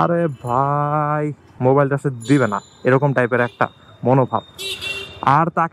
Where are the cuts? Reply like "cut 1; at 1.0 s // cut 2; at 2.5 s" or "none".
cut 1; at 1.4 s

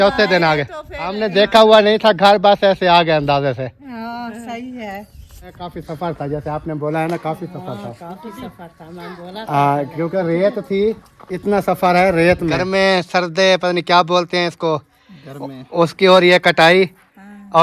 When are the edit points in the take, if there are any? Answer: cut 1; at 1.2 s // cut 2; at 5.8 s // cut 3; at 12.6 s

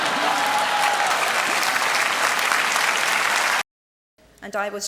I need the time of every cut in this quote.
cut 1; at 3.6 s

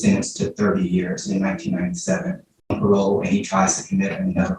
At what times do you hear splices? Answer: cut 1; at 2.8 s

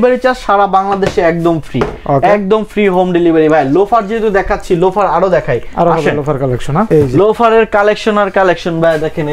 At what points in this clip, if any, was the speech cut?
none

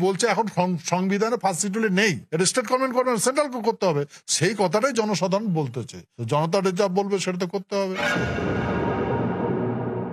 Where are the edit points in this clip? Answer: cut 1; at 8.0 s

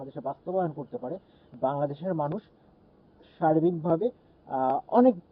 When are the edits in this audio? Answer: none

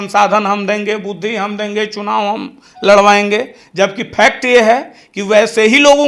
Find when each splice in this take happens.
none

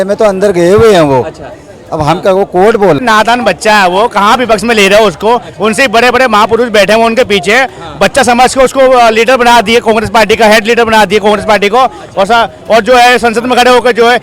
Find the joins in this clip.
cut 1; at 3.0 s

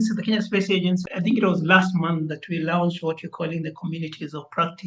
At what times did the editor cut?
cut 1; at 1.1 s

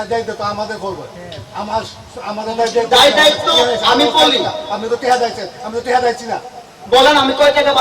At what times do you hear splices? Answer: none

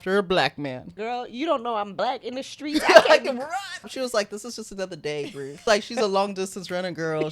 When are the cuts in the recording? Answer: cut 1; at 1.0 s // cut 2; at 3.9 s // cut 3; at 5.5 s

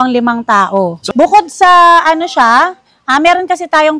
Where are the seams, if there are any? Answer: cut 1; at 1.0 s

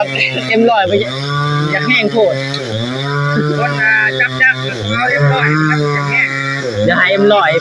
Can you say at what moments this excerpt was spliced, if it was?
none

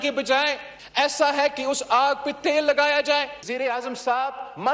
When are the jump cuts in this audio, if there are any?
cut 1; at 3.4 s

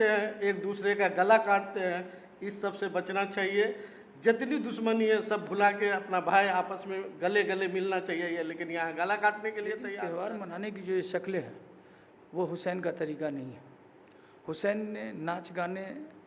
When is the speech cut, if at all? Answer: cut 1; at 10.0 s

